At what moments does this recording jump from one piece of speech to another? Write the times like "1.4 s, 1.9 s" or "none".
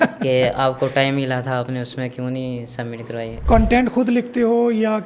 3.3 s